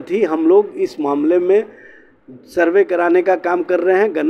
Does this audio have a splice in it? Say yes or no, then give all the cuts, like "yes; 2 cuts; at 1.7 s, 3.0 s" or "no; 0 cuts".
no; 0 cuts